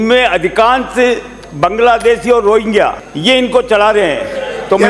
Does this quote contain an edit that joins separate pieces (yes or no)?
yes